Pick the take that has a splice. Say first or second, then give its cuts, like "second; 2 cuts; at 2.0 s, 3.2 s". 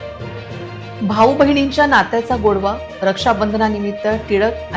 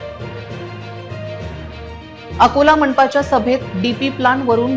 first; 1 cut; at 1.0 s